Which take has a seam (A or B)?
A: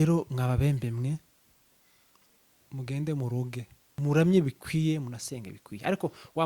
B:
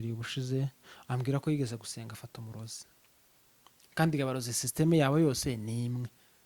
A